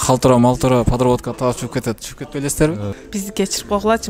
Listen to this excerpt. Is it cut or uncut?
cut